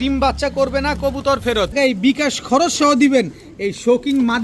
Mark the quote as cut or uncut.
cut